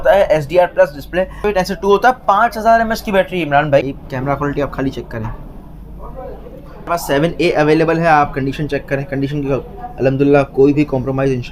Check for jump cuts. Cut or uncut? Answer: cut